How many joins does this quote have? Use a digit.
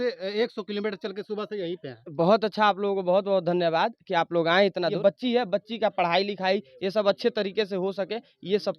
1